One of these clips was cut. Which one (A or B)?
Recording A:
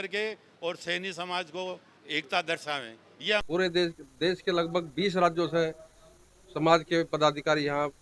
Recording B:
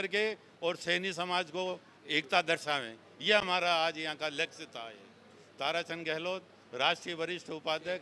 A